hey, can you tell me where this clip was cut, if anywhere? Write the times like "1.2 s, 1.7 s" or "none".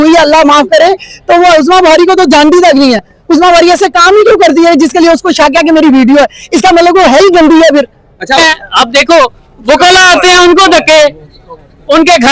8.4 s